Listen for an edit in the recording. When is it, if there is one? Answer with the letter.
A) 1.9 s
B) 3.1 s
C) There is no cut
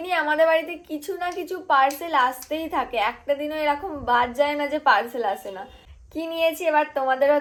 C